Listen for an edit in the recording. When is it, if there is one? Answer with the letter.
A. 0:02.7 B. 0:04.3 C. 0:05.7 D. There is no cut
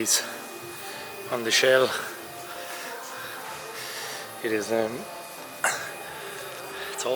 D